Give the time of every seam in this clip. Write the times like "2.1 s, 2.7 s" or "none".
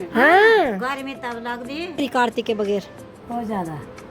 2.0 s